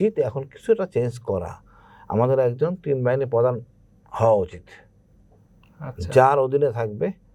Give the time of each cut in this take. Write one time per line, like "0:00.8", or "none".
none

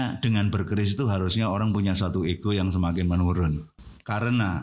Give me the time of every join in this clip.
0:03.7

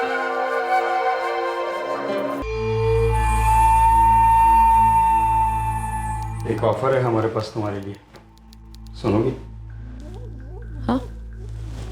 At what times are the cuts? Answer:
0:02.4

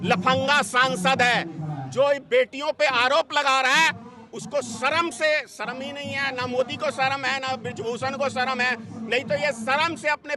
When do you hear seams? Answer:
none

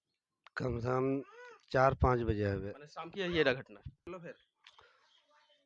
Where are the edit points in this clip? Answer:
0:04.1

